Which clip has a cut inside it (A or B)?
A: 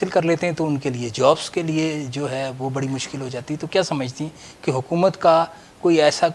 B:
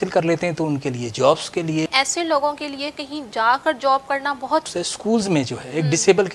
B